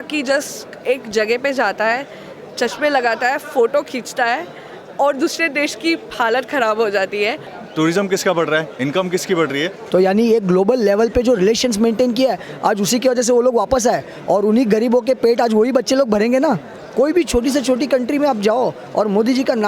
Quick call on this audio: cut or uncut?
cut